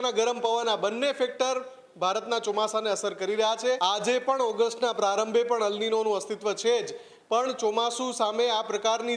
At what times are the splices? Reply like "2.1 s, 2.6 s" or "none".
3.8 s